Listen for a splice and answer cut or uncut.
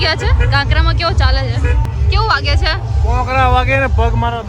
cut